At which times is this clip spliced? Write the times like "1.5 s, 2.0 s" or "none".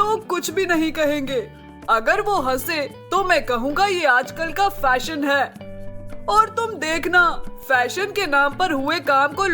none